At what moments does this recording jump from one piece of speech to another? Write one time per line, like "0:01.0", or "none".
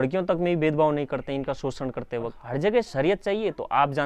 0:02.4